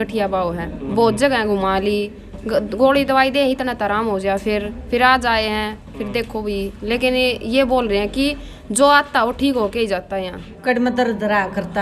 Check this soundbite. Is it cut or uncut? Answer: cut